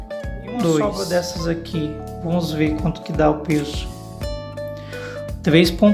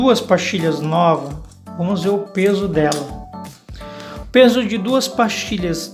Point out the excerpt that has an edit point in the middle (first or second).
first